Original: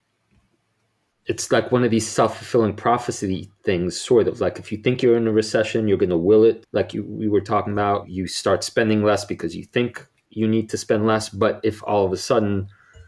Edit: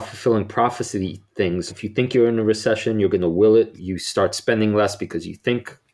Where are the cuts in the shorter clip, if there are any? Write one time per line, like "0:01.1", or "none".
0:01.7
0:03.8